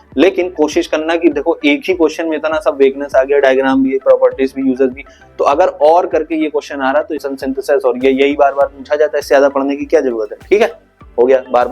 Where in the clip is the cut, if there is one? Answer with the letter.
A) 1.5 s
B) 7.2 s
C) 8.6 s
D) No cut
B